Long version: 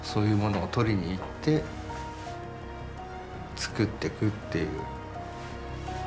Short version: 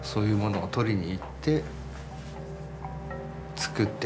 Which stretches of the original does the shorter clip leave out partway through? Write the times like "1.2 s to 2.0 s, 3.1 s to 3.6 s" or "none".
none

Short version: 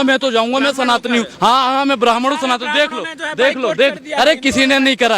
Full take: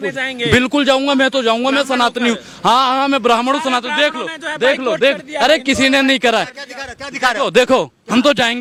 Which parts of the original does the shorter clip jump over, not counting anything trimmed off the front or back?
2.4 s to 2.5 s

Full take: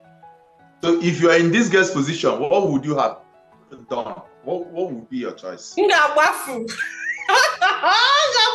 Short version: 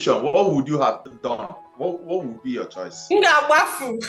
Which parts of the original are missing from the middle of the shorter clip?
3.2 s to 3.7 s

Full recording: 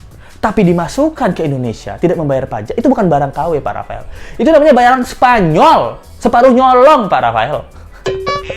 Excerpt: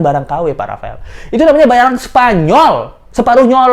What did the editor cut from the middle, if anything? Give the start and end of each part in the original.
none

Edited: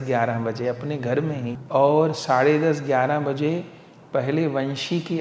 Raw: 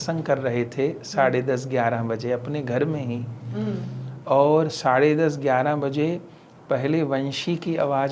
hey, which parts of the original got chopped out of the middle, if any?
3.2 s to 4.2 s

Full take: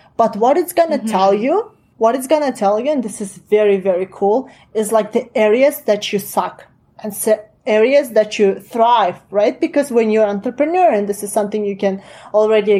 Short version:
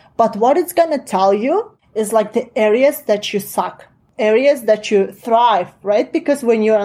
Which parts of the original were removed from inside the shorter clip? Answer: 1.8 s to 4.6 s, 6.8 s to 7.5 s

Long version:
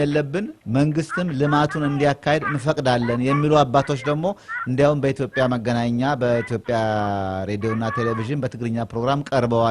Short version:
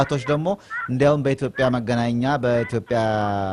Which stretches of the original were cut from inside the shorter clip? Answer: none

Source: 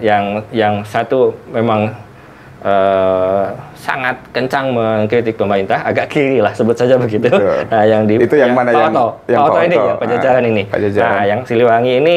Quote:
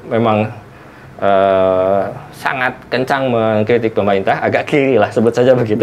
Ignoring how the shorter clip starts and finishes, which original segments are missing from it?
none

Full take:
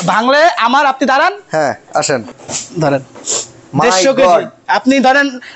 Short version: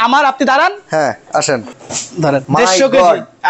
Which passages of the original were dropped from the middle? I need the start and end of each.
2.6 s to 3.2 s

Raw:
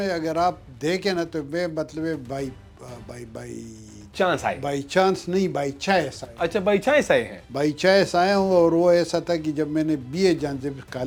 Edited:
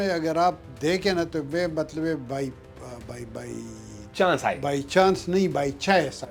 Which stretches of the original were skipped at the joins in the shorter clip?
none

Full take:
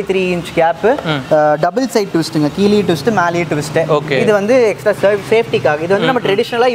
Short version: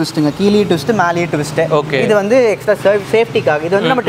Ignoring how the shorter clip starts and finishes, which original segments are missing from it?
none

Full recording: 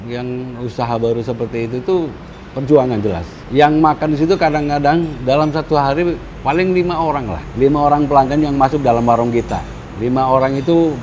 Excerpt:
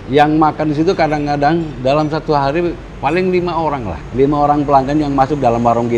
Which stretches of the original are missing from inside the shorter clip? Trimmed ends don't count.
none

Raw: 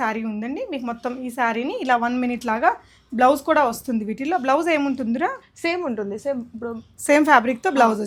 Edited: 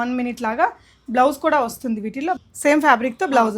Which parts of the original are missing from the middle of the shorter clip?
4.4 s to 6.8 s

